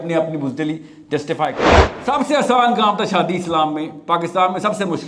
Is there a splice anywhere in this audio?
yes; 1 cut; at 1.9 s

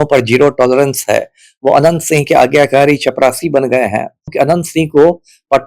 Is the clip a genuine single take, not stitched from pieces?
no; 1 cut; at 4.3 s

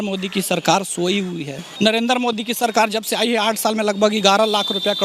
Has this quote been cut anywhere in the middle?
yes; 1 cut; at 1.6 s

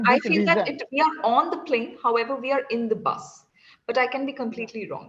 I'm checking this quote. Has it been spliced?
no; 0 cuts

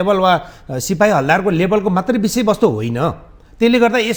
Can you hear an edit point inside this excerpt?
no; 0 cuts

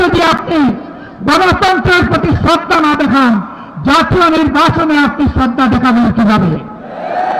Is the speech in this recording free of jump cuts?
yes; 0 cuts

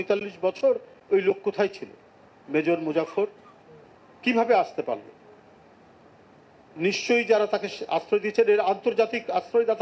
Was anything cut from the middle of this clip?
no; 0 cuts

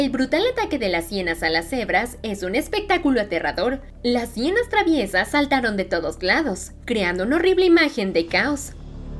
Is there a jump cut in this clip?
no; 0 cuts

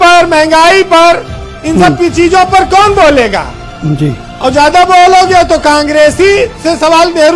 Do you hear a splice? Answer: no; 0 cuts

